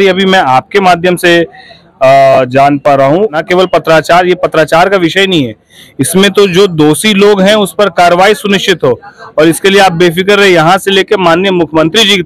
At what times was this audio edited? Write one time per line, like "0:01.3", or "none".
0:03.4